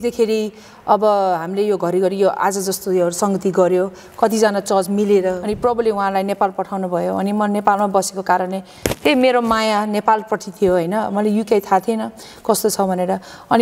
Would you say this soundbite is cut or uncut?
cut